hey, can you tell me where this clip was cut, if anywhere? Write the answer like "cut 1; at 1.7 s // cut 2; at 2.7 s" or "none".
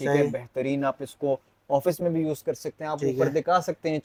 none